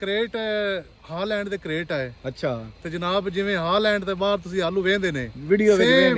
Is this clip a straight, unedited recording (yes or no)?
yes